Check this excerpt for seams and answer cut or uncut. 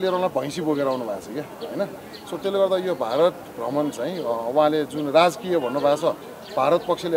uncut